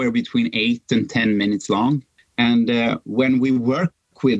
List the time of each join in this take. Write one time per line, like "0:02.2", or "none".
0:02.1